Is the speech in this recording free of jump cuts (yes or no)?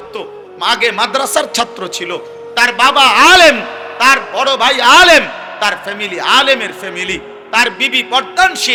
yes